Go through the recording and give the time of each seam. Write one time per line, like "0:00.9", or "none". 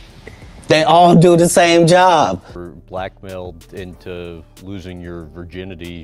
0:02.5

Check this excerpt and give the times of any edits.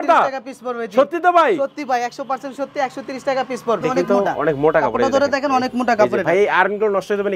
0:03.8

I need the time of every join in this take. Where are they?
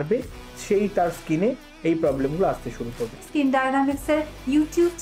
0:03.2

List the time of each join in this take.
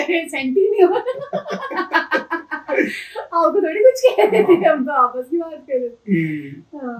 none

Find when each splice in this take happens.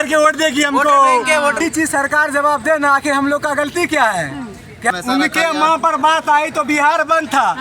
0:01.6
0:04.9

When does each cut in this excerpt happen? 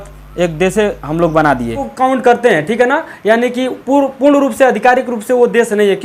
0:01.8

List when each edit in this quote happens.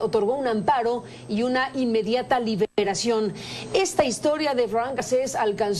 0:04.1

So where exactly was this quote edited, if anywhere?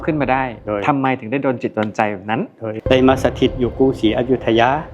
0:02.8

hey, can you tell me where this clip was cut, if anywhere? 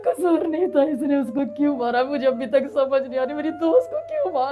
none

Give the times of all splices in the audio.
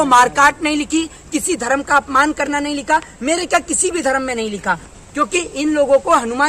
0:04.9

